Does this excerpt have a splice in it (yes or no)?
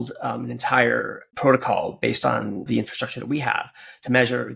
yes